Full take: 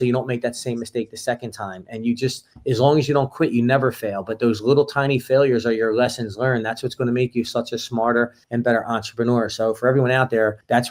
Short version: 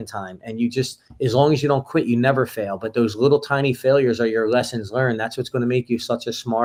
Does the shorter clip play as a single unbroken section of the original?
yes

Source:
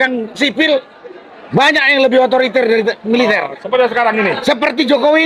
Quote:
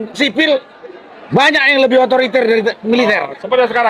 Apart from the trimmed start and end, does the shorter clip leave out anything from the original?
no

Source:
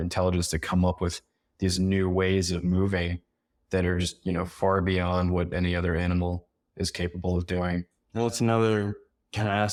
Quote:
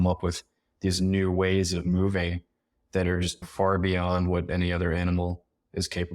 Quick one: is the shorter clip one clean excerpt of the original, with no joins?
no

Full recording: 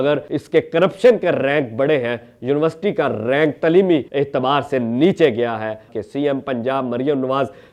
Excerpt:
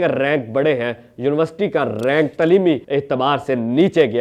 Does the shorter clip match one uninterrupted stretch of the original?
yes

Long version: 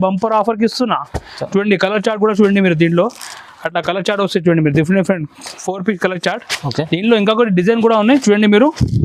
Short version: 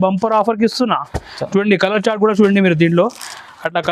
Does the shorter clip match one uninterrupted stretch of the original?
yes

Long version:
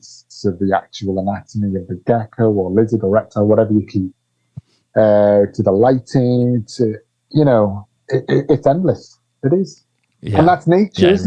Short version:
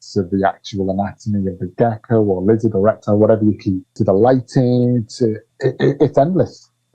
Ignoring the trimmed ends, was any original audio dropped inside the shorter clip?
yes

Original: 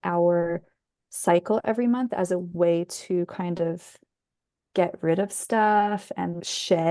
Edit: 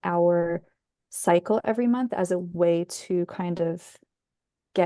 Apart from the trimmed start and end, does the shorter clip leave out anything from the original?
no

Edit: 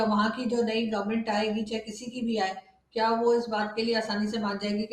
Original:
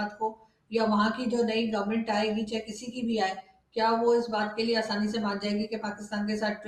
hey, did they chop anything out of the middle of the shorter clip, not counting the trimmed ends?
no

